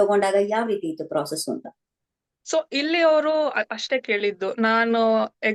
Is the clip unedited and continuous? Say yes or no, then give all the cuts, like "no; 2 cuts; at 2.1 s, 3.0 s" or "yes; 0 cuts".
yes; 0 cuts